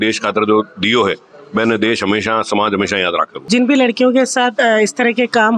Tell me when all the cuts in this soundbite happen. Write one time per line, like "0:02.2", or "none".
0:03.4